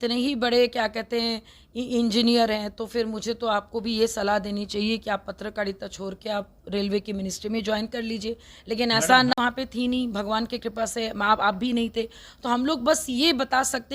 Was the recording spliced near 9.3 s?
yes; 1 cut; at 9.3 s

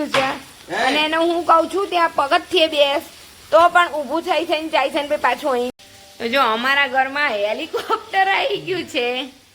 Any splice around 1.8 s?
no; 1 cut; at 5.7 s

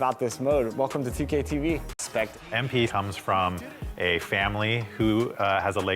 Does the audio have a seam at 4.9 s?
no; 1 cut; at 1.9 s

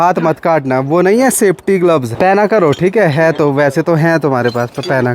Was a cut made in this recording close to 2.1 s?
yes; 1 cut; at 2.1 s

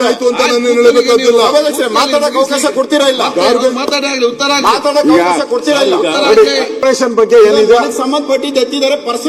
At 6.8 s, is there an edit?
yes; 1 cut; at 6.8 s

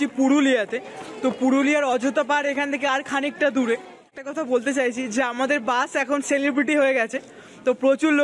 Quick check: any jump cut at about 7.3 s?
no; 1 cut; at 4.2 s

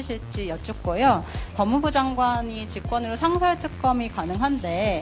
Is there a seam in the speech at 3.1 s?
no; 1 cut; at 1.5 s

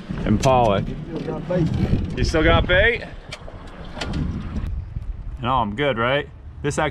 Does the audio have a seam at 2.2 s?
no; 1 cut; at 4.7 s

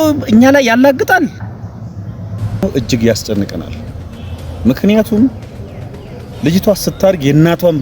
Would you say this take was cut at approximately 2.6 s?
yes; 1 cut; at 2.6 s

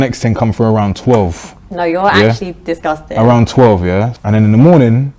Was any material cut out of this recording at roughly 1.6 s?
no; 1 cut; at 3.1 s

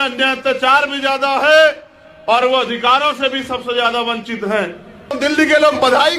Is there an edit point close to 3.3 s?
no; 1 cut; at 5.2 s

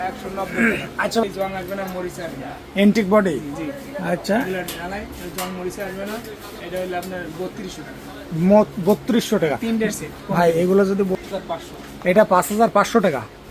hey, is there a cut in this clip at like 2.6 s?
no; 2 cuts; at 1.2 s, 11.2 s

